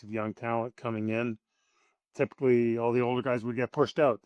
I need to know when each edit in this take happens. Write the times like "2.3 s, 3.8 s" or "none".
none